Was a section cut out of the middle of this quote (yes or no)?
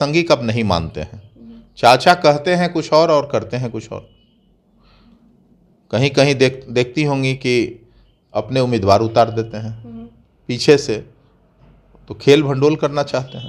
no